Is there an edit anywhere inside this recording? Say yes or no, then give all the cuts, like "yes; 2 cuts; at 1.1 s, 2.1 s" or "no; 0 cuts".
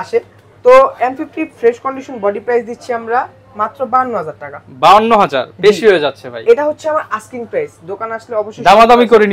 no; 0 cuts